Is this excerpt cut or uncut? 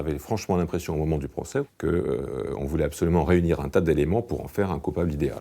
cut